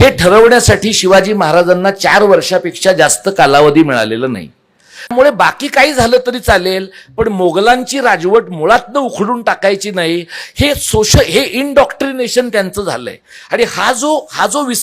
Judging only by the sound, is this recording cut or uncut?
cut